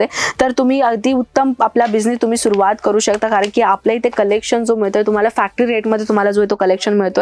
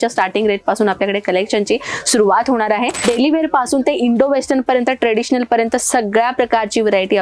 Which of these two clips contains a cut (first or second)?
second